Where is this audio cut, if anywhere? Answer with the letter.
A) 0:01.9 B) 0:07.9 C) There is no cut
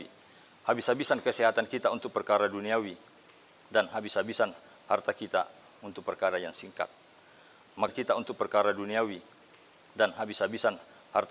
B